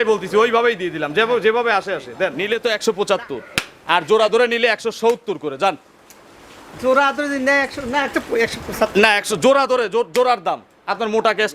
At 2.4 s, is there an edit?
yes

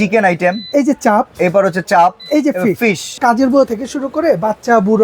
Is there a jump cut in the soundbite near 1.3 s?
no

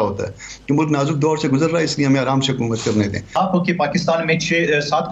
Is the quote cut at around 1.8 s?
no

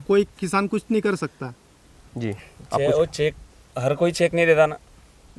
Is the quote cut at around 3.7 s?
no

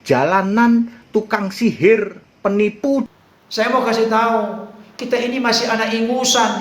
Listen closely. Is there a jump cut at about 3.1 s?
yes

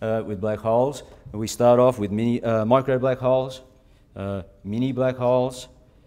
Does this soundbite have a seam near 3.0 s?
yes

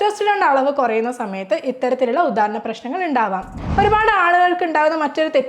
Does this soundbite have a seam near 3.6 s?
yes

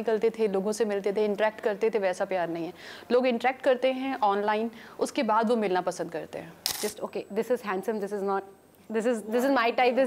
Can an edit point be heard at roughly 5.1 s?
no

